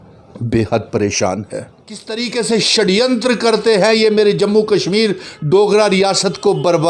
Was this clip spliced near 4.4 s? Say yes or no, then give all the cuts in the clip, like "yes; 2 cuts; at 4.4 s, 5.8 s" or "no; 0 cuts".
no; 1 cut; at 2.1 s